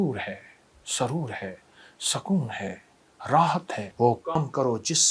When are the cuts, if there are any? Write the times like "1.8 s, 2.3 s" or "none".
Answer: 3.8 s

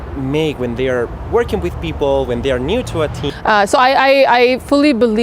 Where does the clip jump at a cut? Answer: 3.3 s

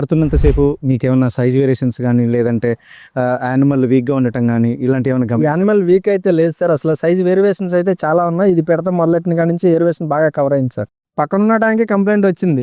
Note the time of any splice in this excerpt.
10.9 s

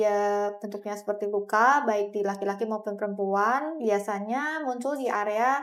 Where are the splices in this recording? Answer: none

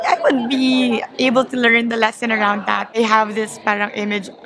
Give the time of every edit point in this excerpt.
2.9 s

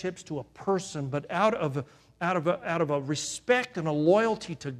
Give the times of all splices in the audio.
none

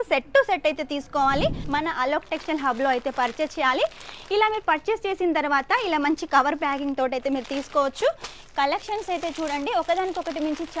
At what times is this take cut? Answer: 1.6 s

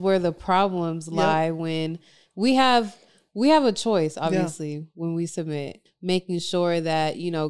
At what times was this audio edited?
5.8 s

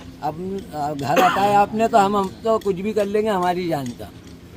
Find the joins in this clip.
none

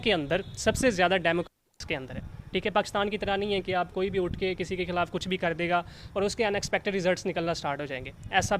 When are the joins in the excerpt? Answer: none

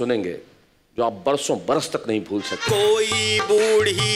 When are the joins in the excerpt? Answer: 2.6 s

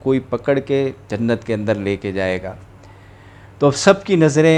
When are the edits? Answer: 1.1 s

